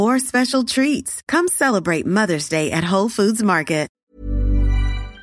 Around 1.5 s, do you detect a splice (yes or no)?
no